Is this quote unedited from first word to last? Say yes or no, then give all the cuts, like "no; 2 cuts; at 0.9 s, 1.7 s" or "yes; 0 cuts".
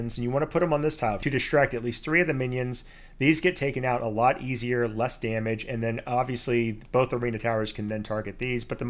no; 1 cut; at 1.2 s